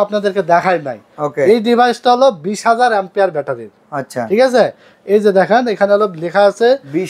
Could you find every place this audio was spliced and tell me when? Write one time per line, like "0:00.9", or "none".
none